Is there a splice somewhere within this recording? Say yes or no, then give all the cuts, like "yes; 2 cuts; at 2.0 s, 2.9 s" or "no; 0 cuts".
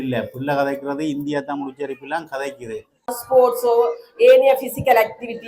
yes; 1 cut; at 3.2 s